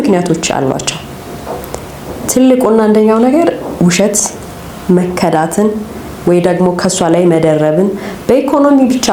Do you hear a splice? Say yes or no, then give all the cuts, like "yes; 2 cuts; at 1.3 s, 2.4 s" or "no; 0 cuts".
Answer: no; 0 cuts